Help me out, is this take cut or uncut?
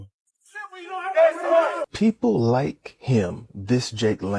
cut